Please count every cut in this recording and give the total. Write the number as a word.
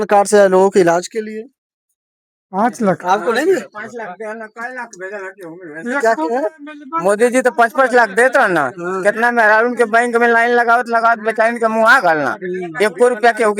zero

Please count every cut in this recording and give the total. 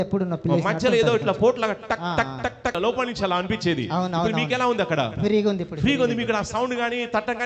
one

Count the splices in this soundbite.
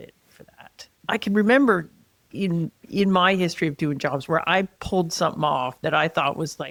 zero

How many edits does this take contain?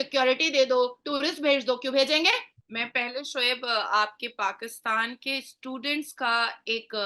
one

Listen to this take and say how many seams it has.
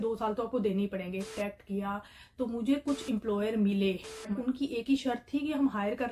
two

